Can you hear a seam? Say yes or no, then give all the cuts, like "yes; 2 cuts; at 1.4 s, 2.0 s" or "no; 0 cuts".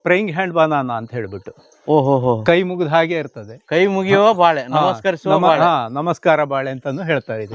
no; 0 cuts